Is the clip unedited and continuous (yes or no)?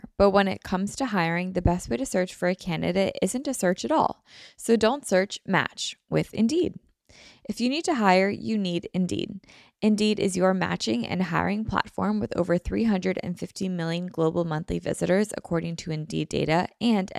yes